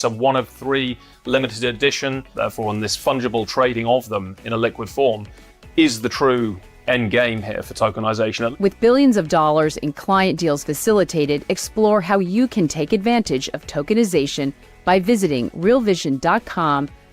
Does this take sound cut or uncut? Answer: uncut